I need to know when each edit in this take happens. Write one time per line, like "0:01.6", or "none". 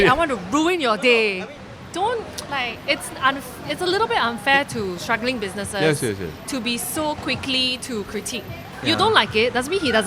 0:01.4
0:08.6